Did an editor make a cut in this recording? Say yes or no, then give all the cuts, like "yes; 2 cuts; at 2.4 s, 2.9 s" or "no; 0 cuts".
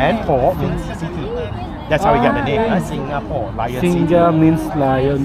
no; 0 cuts